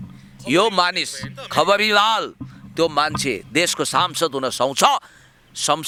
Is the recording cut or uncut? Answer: uncut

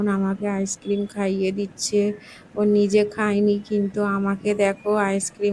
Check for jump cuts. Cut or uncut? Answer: uncut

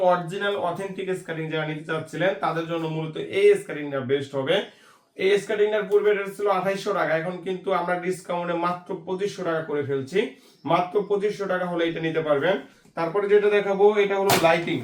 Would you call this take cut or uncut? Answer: uncut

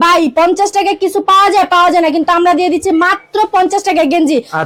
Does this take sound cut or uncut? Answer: uncut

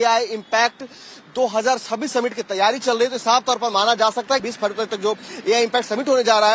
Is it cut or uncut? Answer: cut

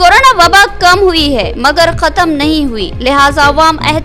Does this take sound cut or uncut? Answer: uncut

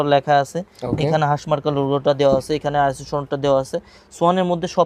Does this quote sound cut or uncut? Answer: uncut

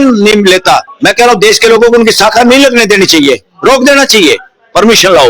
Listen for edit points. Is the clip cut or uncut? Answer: cut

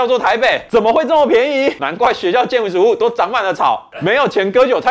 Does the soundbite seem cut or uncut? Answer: uncut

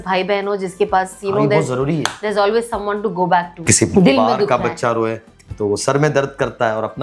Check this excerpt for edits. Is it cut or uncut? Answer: cut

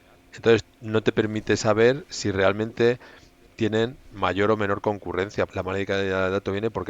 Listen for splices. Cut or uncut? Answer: cut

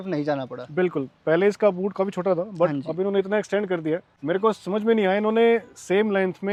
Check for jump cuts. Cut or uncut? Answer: uncut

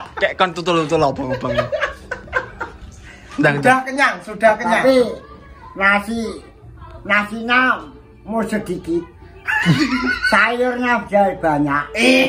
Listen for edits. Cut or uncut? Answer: uncut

